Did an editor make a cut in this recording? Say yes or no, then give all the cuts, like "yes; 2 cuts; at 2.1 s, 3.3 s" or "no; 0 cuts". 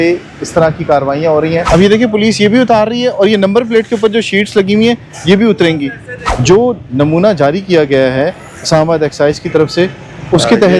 yes; 2 cuts; at 1.6 s, 6.2 s